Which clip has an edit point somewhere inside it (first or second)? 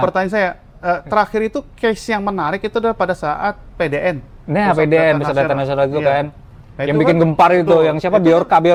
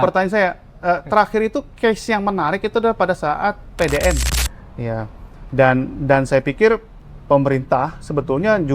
second